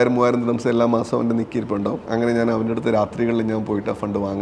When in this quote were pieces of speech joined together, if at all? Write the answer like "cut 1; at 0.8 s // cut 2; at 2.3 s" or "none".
cut 1; at 2.0 s